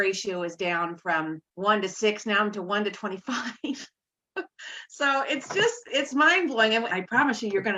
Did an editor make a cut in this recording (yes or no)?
yes